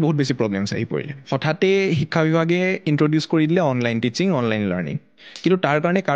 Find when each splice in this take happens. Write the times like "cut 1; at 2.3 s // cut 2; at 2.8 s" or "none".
cut 1; at 1.2 s